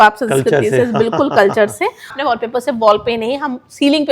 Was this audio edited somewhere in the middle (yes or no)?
yes